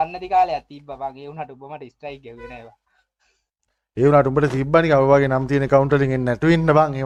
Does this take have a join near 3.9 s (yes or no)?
no